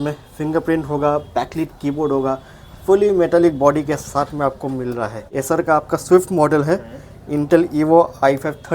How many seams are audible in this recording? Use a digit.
1